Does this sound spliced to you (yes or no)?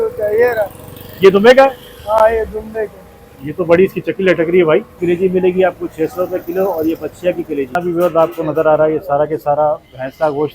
yes